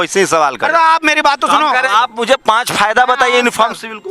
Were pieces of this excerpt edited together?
yes; 1 cut; at 1.9 s

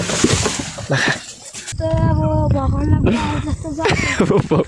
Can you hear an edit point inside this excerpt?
yes; 1 cut; at 1.7 s

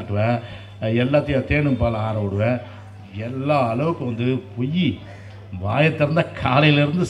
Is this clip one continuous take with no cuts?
yes; 0 cuts

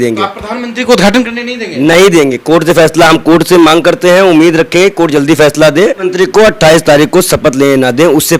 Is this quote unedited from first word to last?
no; 1 cut; at 6.0 s

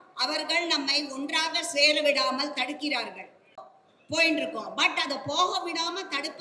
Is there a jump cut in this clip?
yes; 1 cut; at 3.7 s

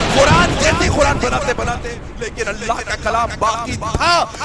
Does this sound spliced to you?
yes; 1 cut; at 1.9 s

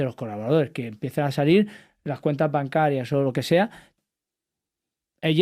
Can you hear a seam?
yes; 1 cut; at 3.8 s

